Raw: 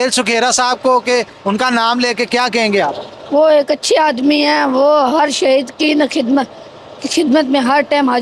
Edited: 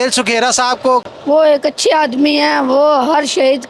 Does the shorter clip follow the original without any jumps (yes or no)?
no